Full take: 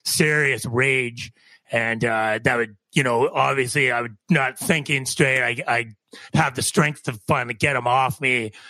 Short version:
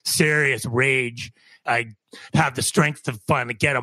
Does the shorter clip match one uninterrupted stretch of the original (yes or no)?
no